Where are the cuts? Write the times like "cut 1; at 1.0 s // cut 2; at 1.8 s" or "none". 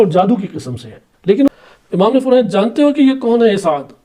cut 1; at 1.5 s